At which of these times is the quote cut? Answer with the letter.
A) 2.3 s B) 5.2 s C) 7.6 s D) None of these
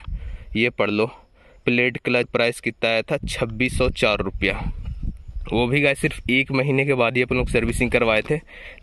A